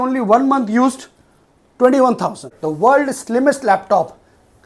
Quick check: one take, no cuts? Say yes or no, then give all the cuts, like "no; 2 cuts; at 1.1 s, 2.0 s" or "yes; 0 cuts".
no; 1 cut; at 2.5 s